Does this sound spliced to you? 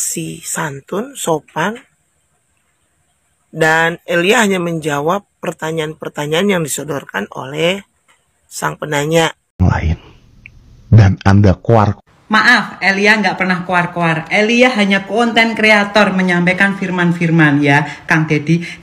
yes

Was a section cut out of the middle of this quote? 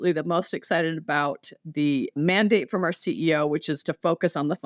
no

